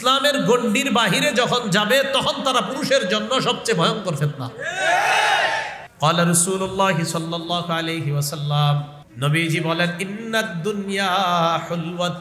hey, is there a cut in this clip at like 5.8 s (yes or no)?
yes